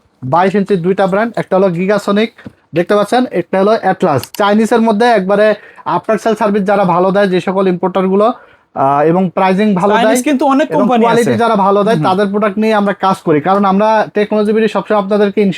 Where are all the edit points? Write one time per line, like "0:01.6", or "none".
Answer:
0:04.3